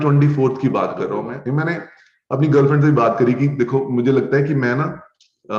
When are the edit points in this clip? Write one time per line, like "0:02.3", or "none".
0:01.3